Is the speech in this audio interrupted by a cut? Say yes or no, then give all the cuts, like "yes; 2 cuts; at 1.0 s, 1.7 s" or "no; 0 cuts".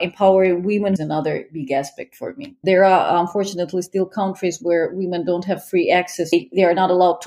yes; 3 cuts; at 1.0 s, 2.6 s, 6.3 s